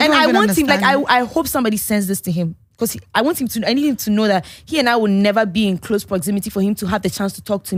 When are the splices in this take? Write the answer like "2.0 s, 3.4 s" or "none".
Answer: none